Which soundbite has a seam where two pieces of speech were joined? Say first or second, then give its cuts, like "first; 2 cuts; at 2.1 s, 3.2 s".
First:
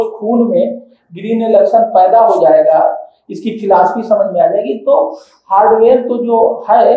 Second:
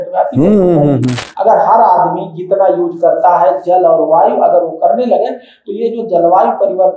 second; 1 cut; at 1.2 s